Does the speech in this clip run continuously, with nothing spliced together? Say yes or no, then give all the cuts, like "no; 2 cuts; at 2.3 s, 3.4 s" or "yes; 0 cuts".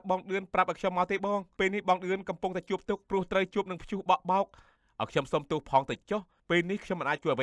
no; 4 cuts; at 1.5 s, 3.0 s, 4.7 s, 6.3 s